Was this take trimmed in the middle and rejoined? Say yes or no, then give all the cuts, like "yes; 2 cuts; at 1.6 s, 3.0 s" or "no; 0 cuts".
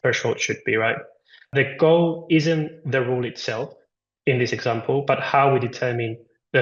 no; 0 cuts